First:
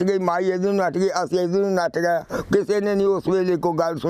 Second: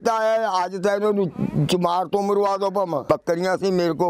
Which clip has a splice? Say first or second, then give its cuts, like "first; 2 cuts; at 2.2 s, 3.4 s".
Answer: second; 1 cut; at 3.1 s